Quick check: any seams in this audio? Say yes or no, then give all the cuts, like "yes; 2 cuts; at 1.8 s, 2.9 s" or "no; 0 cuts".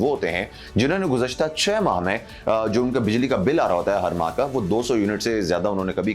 no; 0 cuts